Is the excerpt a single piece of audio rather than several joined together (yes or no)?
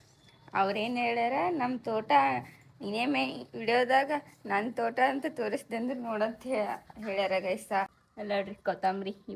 no